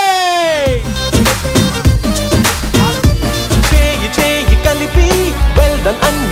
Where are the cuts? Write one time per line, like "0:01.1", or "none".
none

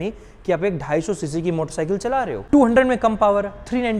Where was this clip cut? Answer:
0:02.4

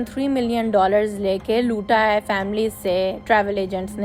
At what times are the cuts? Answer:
none

